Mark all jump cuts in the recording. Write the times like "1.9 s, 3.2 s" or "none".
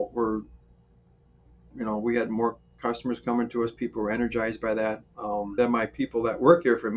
5.5 s